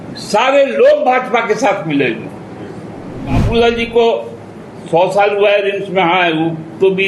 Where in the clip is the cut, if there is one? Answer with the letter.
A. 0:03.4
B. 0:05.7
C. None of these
A